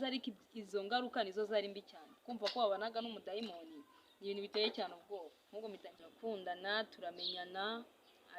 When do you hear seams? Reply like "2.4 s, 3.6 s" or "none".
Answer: 5.9 s